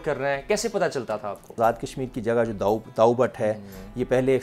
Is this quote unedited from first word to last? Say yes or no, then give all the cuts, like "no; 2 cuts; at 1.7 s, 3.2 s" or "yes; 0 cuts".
no; 1 cut; at 1.6 s